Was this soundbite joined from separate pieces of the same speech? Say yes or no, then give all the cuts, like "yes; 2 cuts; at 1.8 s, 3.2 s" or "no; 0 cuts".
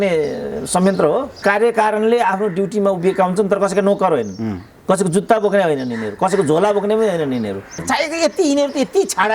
yes; 2 cuts; at 1.4 s, 7.8 s